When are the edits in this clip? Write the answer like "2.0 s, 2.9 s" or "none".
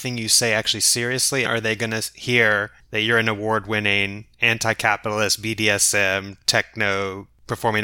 1.5 s